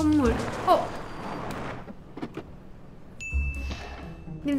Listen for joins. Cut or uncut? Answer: cut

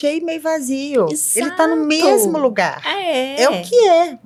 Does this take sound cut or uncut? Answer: uncut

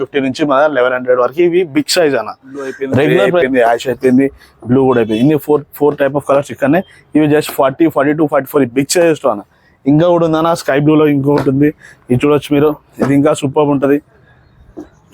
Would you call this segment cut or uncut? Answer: cut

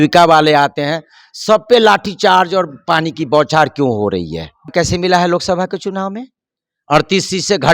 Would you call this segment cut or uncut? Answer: cut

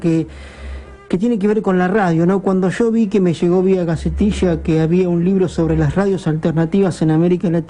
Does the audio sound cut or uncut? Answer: cut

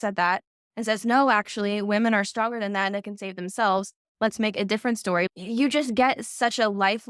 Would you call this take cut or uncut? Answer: cut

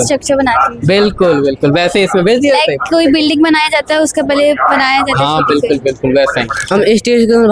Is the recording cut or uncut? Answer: cut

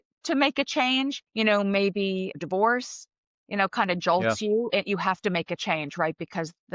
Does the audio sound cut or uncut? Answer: cut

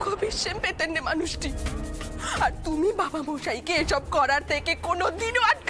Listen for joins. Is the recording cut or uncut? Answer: uncut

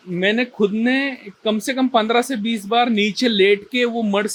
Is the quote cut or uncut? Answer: uncut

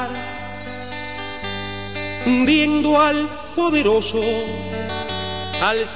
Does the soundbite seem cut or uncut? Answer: cut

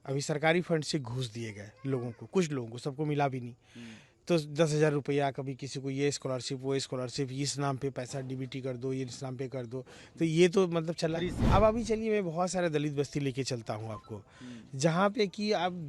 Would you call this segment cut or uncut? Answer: cut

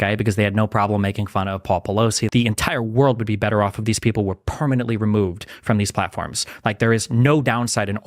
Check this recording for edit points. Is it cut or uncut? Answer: cut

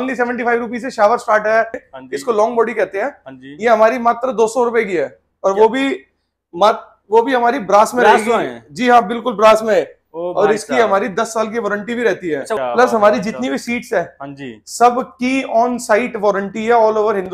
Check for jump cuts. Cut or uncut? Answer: cut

